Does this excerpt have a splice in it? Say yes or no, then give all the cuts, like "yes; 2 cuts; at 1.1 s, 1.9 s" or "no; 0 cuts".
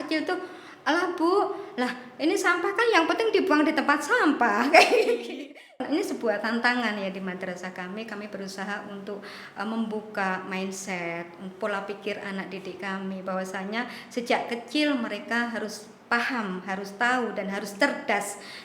yes; 1 cut; at 5.7 s